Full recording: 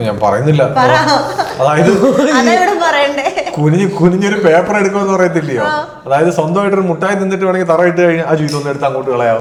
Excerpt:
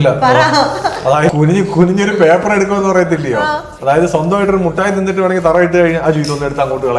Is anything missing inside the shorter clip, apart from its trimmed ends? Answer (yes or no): yes